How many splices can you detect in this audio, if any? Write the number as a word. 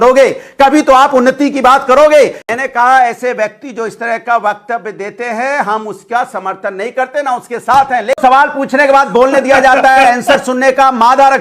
two